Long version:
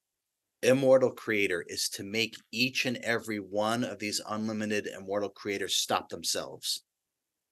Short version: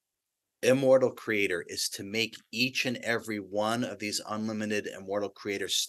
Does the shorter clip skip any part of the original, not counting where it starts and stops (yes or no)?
no